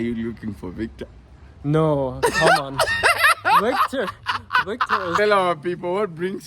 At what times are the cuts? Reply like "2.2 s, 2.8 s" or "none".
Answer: 5.2 s